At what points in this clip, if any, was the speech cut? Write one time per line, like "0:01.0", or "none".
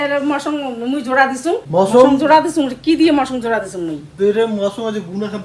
0:01.6

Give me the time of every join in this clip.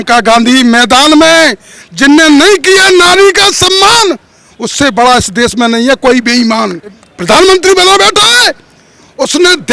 0:07.1

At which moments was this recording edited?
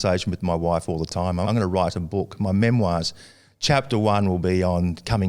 0:01.4

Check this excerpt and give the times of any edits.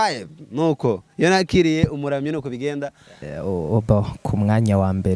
0:03.2

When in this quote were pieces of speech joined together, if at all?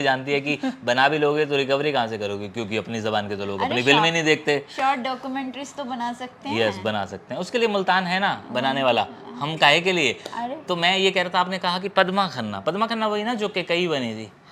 none

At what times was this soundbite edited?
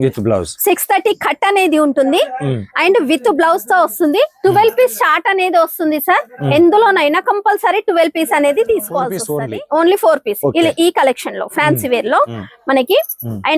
0:09.2

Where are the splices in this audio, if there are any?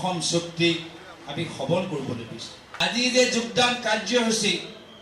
0:02.8

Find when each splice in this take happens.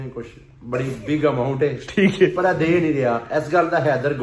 none

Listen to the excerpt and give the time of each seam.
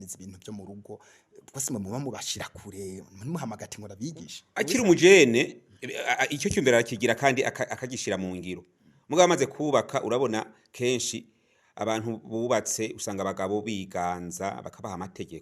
0:04.4

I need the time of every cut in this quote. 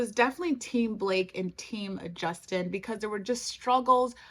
none

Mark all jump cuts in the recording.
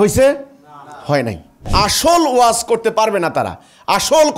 0:01.5

